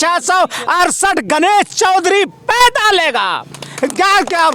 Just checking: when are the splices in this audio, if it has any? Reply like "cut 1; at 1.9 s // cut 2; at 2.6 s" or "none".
none